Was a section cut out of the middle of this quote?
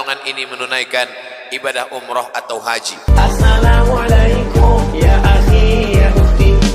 yes; 1 cut; at 2.9 s

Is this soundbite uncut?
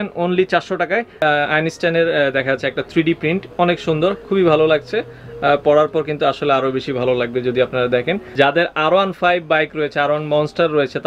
no; 2 cuts; at 1.2 s, 8.2 s

